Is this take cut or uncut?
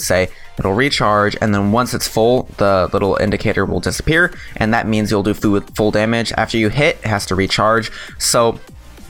uncut